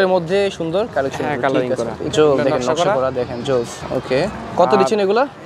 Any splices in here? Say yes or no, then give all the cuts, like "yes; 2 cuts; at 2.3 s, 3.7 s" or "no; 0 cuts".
yes; 2 cuts; at 2.0 s, 4.5 s